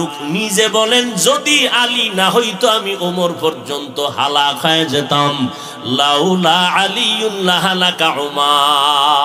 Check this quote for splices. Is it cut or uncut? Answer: uncut